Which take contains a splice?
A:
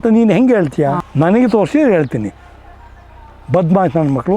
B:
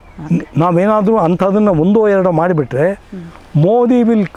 A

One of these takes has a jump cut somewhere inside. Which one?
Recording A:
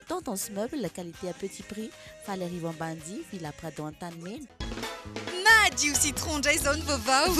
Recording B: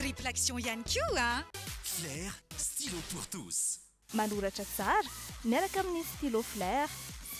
A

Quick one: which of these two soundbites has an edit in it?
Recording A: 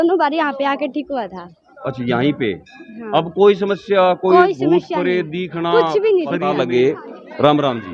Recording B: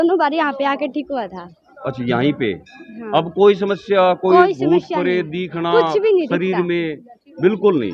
A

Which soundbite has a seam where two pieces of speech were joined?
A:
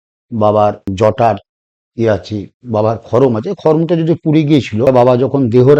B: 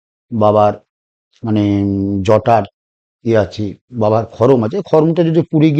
A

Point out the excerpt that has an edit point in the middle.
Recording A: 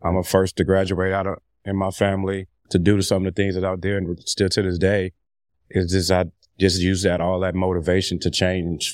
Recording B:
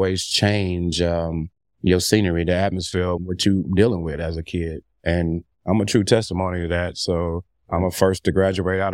B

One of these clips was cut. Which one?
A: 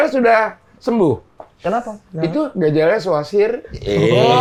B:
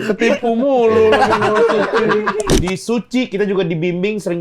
B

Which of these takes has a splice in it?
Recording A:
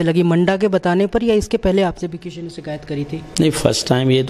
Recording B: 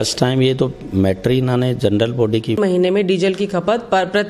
B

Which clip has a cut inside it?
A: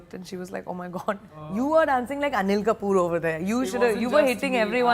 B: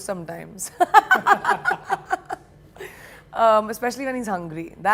A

